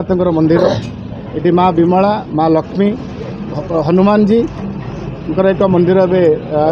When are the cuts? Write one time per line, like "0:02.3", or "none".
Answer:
none